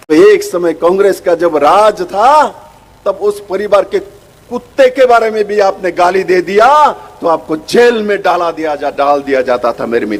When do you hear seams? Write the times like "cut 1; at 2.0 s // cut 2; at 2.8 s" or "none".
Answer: none